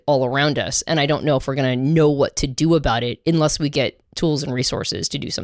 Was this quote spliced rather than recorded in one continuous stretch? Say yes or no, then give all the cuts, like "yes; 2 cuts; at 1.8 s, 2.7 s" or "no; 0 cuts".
no; 0 cuts